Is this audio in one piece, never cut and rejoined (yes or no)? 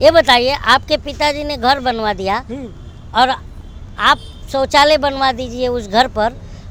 yes